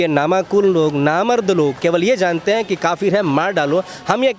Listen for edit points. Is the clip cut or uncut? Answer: cut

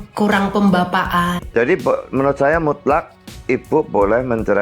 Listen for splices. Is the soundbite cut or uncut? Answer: cut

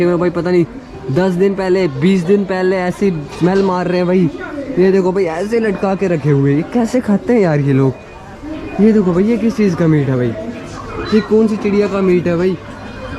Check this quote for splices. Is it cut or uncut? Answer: uncut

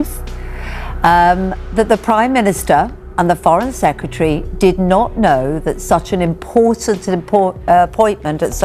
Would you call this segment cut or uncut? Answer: uncut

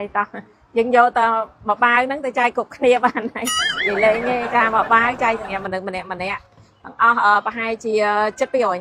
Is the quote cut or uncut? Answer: uncut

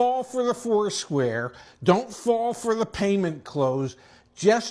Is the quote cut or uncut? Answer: uncut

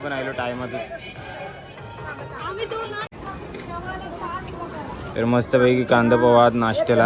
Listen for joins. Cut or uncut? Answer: uncut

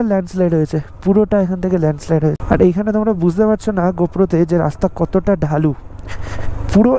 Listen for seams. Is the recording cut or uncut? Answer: uncut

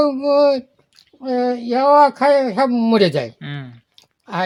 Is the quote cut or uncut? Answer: uncut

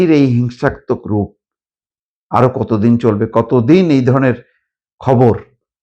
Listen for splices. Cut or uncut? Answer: uncut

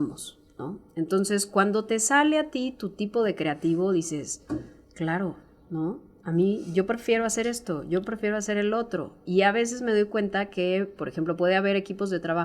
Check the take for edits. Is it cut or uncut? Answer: uncut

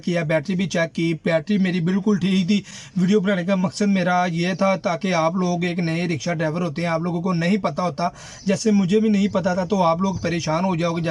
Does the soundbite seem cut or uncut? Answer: uncut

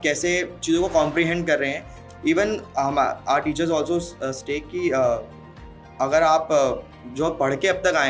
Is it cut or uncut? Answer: uncut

